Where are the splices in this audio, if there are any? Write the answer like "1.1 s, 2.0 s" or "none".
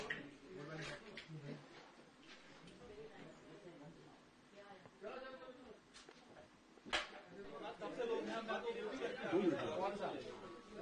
none